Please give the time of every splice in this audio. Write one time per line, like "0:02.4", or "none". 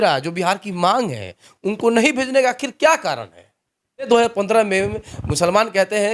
0:04.1